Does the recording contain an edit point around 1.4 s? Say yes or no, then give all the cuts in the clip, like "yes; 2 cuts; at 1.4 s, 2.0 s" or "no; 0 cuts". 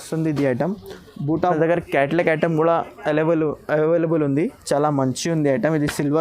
yes; 1 cut; at 1.4 s